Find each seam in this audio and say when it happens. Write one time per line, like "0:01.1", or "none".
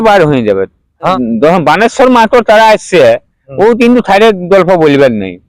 0:01.1